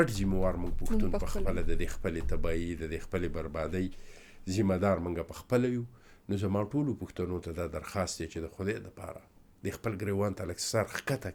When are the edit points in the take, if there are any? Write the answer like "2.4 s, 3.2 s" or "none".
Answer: none